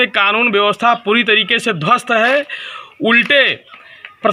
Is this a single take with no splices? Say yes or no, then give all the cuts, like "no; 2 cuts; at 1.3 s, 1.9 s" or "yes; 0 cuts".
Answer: yes; 0 cuts